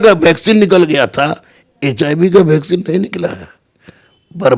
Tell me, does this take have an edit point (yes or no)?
no